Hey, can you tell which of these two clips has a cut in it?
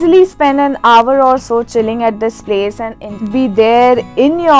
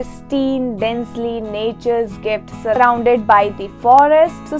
first; 1 cut; at 3.2 s

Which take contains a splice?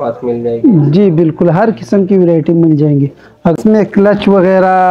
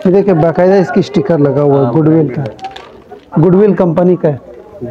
first; 1 cut; at 3.6 s

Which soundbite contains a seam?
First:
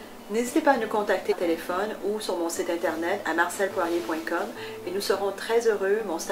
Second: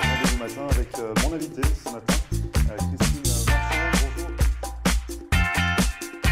first; 1 cut; at 1.3 s

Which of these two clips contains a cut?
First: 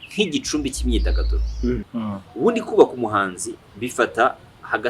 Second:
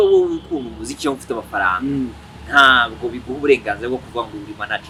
first; 1 cut; at 1.9 s

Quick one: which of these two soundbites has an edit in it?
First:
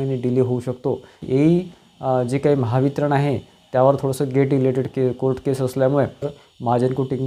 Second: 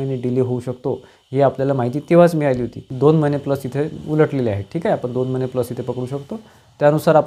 first; 2 cuts; at 1.2 s, 6.4 s

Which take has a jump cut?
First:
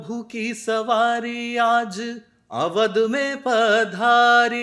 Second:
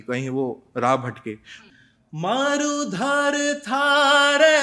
second; 1 cut; at 1.4 s

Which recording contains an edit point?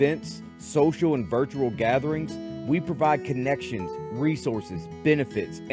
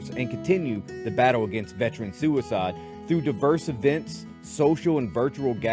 second; 1 cut; at 2.9 s

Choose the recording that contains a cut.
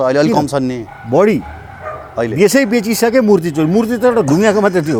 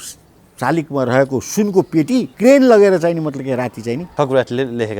second; 2 cuts; at 2.3 s, 4.1 s

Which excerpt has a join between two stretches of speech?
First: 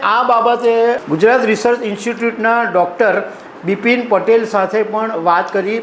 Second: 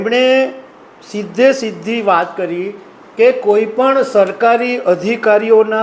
first; 1 cut; at 1.0 s

